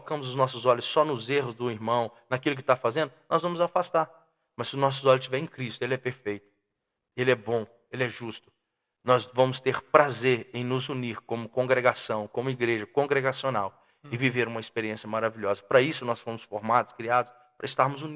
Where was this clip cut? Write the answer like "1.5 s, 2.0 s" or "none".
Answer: none

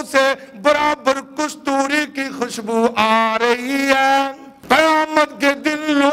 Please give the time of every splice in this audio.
4.5 s

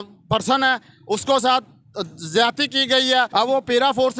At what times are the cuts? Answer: 3.3 s

